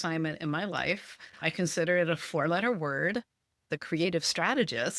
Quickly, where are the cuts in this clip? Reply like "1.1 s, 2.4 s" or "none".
3.7 s